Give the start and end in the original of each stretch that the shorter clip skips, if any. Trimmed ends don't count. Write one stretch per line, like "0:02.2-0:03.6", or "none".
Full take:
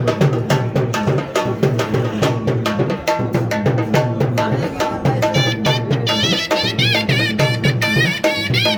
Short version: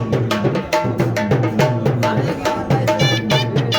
none